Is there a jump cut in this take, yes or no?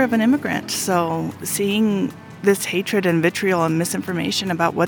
no